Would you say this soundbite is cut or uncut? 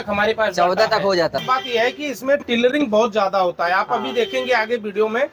cut